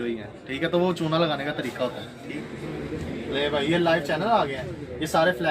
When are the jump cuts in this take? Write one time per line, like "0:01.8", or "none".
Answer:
0:02.3